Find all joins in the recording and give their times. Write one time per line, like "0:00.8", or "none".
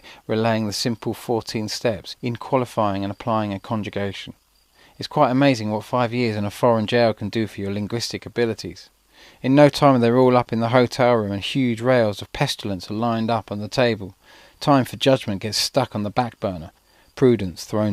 0:10.1

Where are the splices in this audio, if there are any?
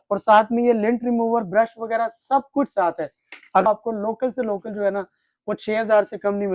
0:03.6

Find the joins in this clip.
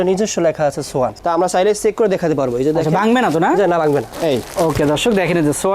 0:01.2
0:04.1

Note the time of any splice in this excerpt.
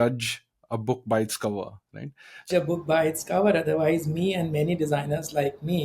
0:02.5

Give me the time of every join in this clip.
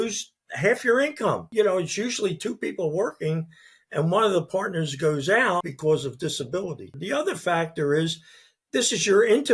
0:01.4
0:05.7
0:06.9

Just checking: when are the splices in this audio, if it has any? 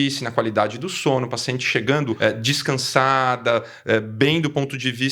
0:02.2

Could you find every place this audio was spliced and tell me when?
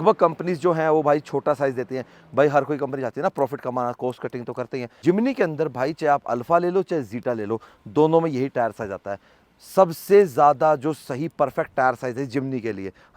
none

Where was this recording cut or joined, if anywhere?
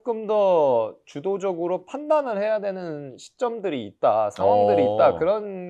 none

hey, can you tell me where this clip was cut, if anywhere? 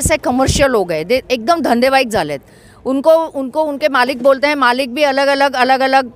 none

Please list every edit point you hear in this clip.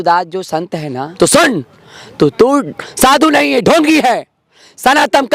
0:01.1

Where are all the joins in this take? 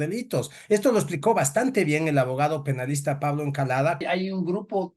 0:04.0

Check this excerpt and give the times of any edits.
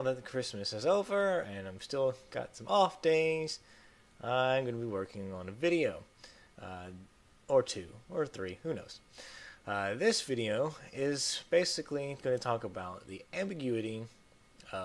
none

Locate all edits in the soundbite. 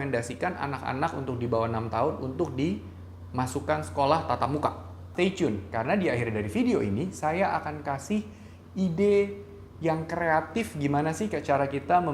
0:05.1

